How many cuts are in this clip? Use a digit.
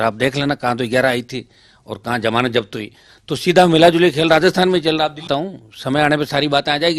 1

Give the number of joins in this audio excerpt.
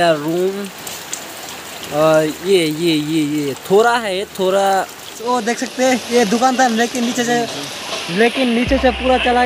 1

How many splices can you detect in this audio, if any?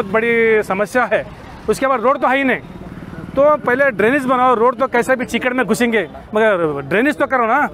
0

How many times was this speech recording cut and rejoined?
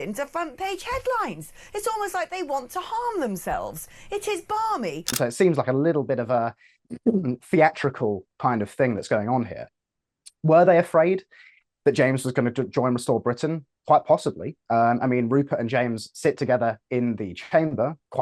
1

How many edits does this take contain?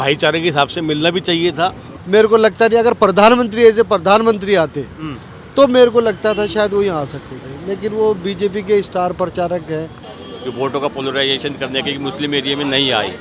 2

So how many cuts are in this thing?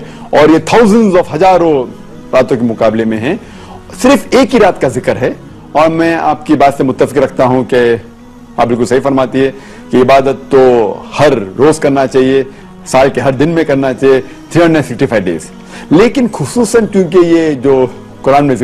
0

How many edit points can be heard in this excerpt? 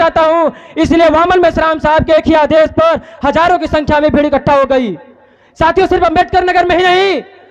0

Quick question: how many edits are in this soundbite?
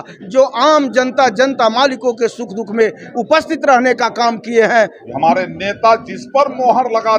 1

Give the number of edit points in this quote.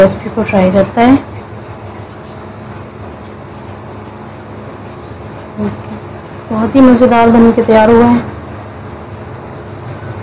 1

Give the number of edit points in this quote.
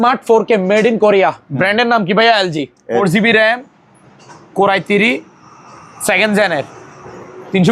1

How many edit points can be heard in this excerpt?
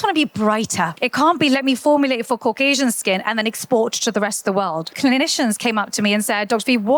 2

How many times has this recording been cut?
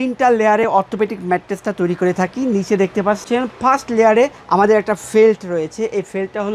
0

